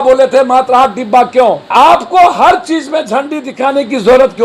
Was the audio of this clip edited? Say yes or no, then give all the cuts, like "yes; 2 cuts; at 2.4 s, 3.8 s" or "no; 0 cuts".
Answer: yes; 1 cut; at 1.7 s